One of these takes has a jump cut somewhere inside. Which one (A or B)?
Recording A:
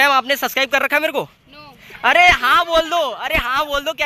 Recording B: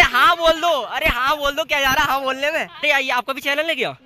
B